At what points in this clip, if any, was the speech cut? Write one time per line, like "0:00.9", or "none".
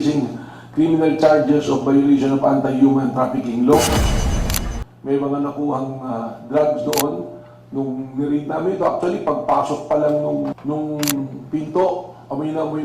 0:04.4
0:10.6

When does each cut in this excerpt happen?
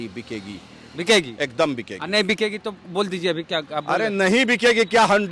none

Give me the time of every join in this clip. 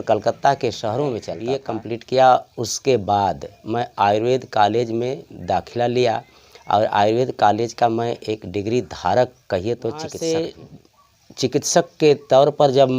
0:01.6
0:10.1

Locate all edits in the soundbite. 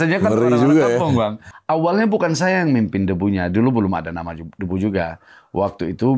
0:01.5

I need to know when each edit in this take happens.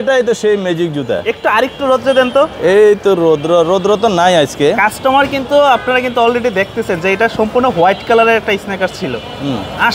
none

